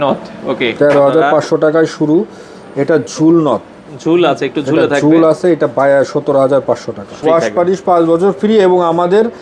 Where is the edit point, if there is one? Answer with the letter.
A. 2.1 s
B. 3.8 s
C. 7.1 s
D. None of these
C